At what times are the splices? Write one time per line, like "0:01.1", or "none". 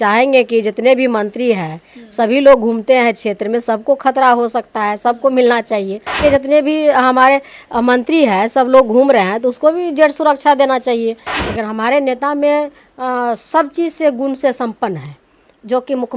0:06.2
0:11.3